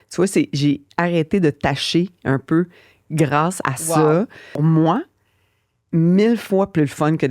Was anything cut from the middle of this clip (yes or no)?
yes